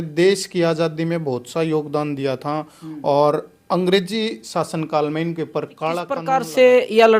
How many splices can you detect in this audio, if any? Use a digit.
1